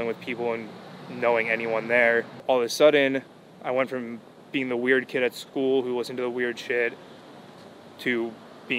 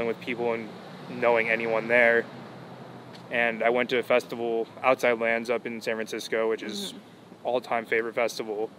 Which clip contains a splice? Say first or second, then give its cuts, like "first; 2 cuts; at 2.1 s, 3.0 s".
first; 1 cut; at 2.4 s